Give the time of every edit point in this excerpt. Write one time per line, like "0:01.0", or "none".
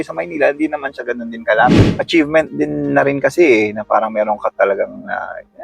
0:01.8